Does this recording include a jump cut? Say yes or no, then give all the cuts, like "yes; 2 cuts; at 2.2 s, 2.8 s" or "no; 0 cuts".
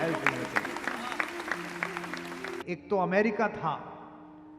yes; 1 cut; at 2.5 s